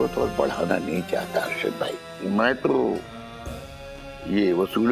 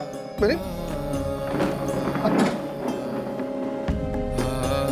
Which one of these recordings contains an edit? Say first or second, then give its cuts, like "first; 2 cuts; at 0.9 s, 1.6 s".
first; 1 cut; at 2.0 s